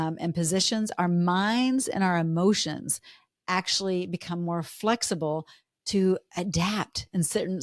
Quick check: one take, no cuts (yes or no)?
yes